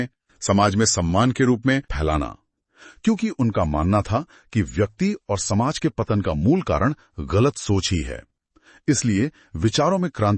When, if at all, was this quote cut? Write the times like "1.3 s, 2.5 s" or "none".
1.9 s